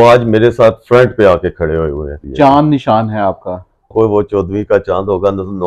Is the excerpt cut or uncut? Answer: cut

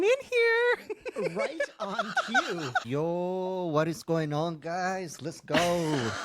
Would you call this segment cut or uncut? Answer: cut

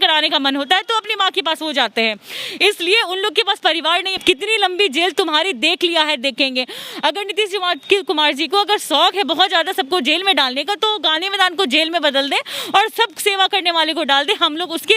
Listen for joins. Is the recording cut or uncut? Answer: cut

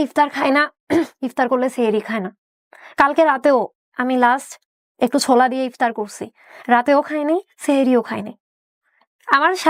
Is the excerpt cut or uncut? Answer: uncut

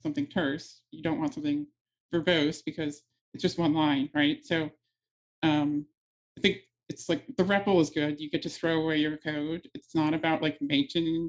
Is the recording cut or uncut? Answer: uncut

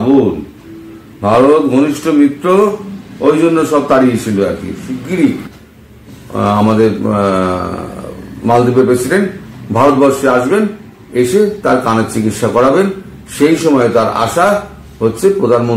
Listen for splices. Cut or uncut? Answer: cut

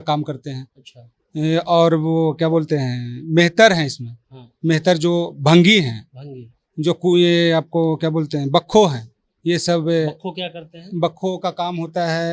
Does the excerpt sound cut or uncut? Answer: uncut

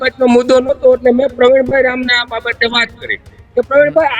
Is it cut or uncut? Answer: uncut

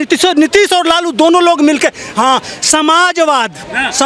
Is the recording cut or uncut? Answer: uncut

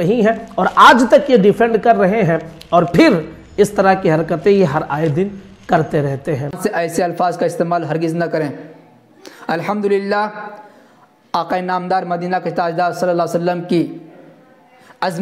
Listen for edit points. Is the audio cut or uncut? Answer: cut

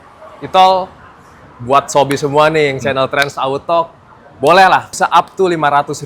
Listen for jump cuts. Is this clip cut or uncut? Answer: cut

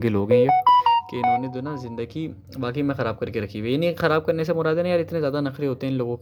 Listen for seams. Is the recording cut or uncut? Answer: uncut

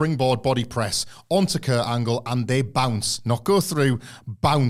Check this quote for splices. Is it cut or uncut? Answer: uncut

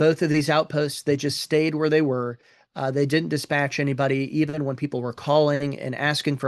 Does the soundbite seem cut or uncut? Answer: uncut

